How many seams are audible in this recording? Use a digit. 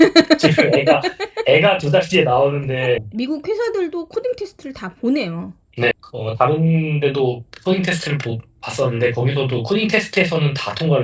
2